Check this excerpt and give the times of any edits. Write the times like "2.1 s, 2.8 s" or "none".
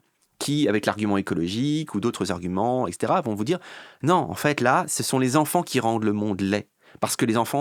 none